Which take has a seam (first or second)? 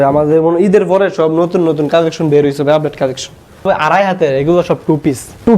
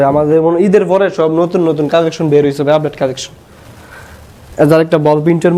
first